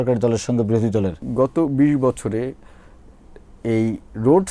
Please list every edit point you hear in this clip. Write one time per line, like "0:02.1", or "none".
0:01.2